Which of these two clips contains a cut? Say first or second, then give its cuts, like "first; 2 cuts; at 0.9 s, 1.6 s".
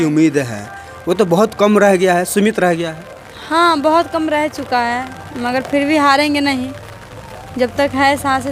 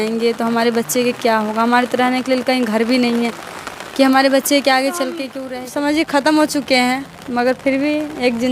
second; 1 cut; at 5.3 s